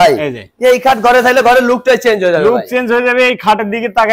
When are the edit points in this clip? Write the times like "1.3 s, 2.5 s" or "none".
none